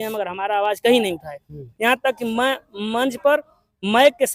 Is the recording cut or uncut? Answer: uncut